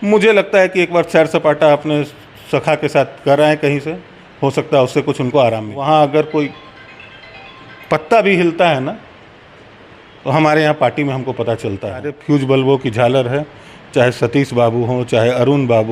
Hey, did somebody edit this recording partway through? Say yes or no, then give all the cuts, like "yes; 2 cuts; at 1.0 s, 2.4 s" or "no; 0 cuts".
yes; 2 cuts; at 5.7 s, 12.1 s